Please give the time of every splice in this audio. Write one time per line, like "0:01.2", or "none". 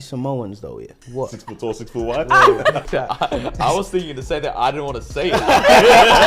0:00.9
0:02.8